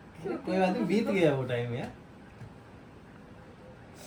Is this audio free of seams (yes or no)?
yes